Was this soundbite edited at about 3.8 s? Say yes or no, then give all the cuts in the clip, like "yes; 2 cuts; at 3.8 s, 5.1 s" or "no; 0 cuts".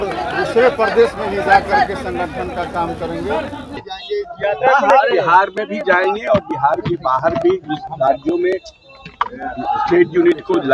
yes; 1 cut; at 3.8 s